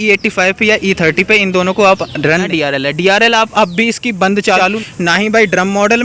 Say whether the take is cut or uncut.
cut